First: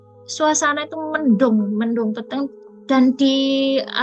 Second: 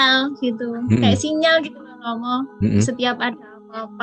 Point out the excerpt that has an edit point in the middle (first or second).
first